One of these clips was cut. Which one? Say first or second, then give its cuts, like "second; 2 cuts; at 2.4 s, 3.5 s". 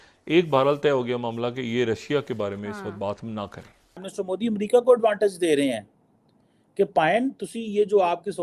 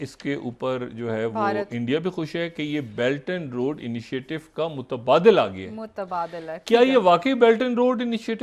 first; 1 cut; at 4.1 s